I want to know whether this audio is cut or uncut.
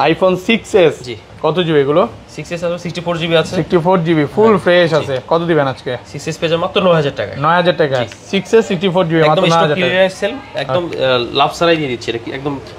uncut